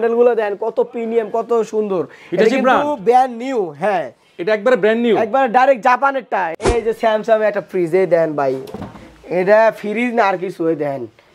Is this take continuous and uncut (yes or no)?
no